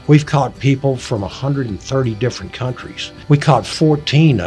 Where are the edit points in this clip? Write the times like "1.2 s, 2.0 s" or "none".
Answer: 3.1 s